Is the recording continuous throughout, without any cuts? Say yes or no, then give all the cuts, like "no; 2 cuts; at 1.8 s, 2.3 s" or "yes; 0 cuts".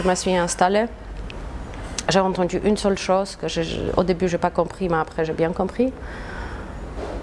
yes; 0 cuts